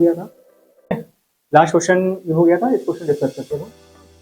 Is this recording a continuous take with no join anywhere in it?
no; 1 cut; at 0.9 s

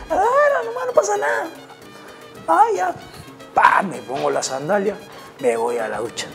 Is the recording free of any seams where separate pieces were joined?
yes; 0 cuts

